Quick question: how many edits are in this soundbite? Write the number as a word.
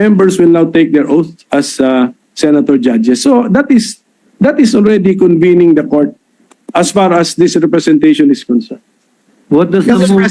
zero